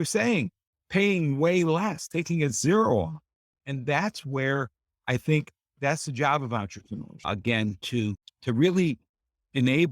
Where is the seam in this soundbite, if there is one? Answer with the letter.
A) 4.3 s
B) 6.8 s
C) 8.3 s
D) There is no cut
C